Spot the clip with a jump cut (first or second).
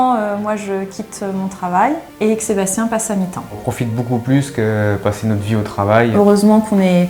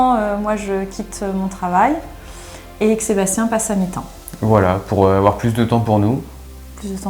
first